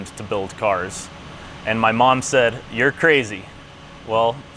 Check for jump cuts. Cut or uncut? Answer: uncut